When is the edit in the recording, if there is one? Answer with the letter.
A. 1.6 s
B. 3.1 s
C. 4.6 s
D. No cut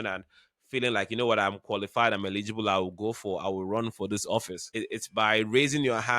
C